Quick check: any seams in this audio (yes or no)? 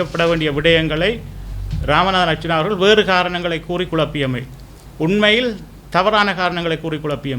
no